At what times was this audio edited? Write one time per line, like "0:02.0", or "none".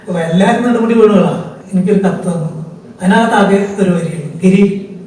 0:01.6